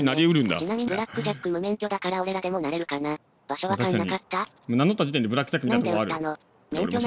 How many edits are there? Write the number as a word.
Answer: zero